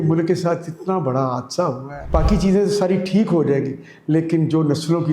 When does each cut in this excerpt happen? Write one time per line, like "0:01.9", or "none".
0:02.1